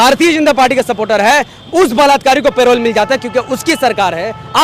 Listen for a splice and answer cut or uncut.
uncut